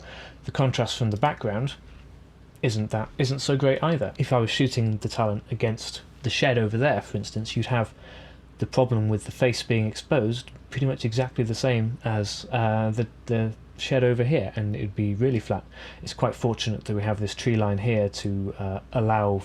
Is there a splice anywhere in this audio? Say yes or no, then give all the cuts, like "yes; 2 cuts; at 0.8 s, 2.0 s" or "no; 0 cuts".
no; 0 cuts